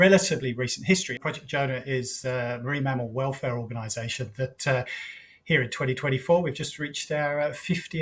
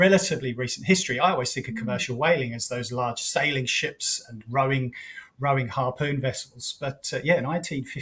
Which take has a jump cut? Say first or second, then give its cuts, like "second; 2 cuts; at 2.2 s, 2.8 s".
first; 1 cut; at 1.1 s